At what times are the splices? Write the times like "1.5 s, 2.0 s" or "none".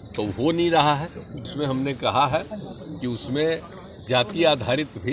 1.5 s

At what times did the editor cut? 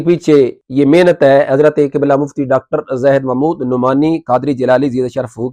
none

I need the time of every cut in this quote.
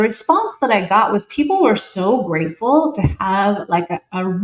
none

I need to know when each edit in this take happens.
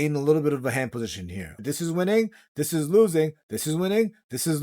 1.6 s

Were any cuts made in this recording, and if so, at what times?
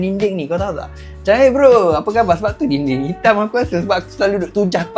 none

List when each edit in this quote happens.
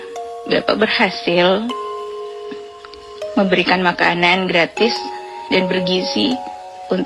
none

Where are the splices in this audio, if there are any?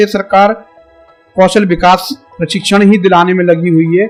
none

